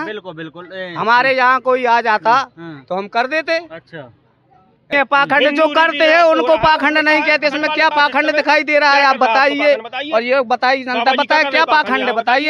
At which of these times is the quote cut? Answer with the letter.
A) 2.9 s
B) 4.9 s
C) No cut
B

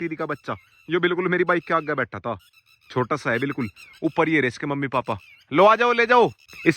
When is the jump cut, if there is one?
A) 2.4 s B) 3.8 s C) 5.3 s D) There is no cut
D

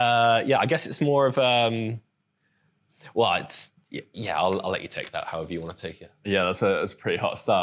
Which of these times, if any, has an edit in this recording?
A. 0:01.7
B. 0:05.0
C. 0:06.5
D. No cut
D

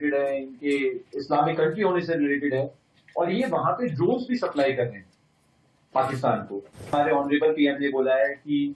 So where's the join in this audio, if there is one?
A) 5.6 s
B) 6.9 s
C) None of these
B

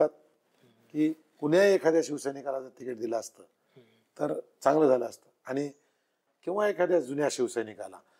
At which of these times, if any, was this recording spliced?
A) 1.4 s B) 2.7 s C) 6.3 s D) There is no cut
C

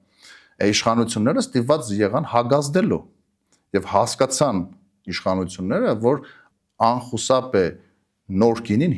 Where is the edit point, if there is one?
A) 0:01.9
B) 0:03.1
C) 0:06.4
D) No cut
C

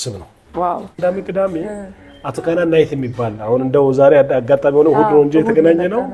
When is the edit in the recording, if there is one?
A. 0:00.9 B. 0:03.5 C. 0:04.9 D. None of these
A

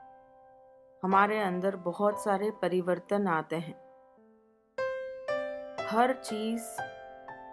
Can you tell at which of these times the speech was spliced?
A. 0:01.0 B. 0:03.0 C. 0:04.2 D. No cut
C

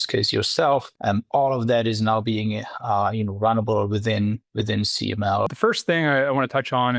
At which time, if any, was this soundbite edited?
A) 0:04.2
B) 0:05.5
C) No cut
B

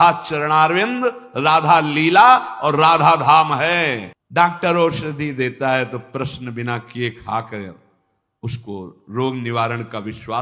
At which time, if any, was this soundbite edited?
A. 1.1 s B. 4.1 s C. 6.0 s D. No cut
B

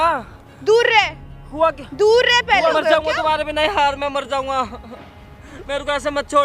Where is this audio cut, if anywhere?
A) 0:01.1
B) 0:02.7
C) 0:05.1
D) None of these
B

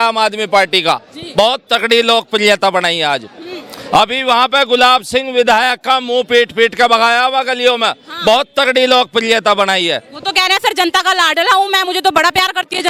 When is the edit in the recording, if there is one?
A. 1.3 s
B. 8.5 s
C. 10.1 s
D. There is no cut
D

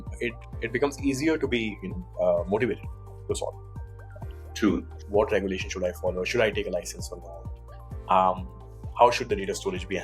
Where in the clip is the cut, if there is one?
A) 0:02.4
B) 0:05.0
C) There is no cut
B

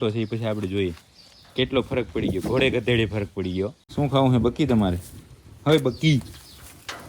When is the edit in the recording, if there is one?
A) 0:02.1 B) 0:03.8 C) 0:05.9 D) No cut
B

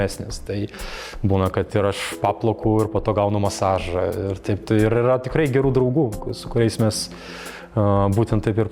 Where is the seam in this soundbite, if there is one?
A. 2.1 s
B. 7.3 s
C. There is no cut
C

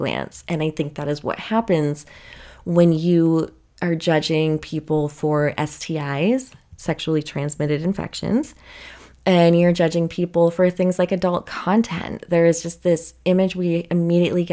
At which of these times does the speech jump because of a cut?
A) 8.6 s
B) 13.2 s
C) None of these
C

